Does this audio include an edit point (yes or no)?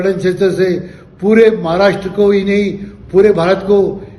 no